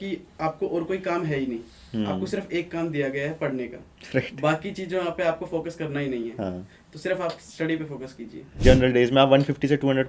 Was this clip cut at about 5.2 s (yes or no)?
no